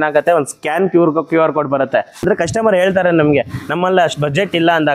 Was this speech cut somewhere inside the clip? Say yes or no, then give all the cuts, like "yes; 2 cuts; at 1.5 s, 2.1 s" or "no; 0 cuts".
yes; 1 cut; at 2.2 s